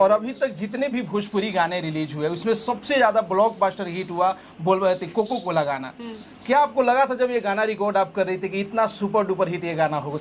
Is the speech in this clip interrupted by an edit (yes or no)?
no